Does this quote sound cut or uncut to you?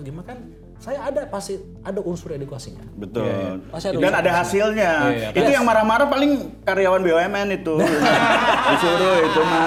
uncut